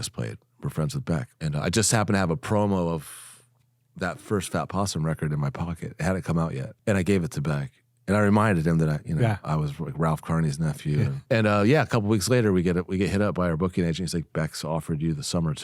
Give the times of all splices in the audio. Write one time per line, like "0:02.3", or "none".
0:01.3
0:06.7
0:11.2

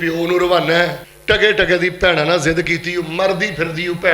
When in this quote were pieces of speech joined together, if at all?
0:01.1

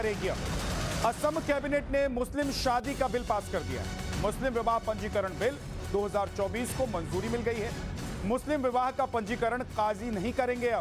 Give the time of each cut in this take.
0:09.7

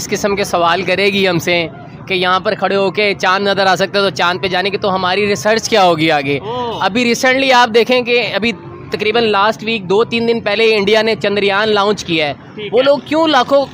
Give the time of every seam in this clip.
none

